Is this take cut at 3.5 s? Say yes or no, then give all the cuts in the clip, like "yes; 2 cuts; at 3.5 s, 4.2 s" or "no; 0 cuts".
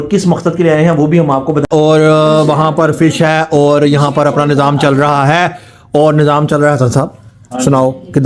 no; 1 cut; at 1.7 s